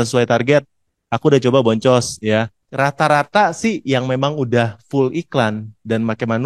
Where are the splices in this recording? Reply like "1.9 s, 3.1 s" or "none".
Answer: 2.6 s